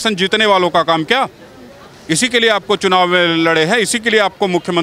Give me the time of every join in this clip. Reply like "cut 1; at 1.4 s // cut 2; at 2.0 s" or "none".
none